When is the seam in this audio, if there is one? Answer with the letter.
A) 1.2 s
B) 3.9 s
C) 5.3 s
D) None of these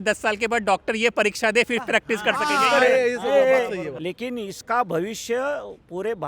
B